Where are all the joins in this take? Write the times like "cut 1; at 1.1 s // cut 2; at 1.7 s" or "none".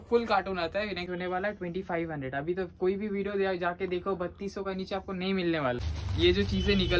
cut 1; at 1.1 s // cut 2; at 5.8 s